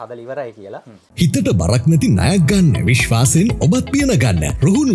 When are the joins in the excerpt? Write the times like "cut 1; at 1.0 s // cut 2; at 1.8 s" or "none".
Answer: cut 1; at 1.0 s